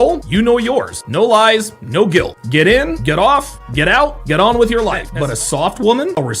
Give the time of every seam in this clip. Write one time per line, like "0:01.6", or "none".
0:05.1